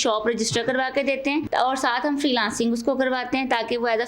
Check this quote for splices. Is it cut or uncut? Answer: cut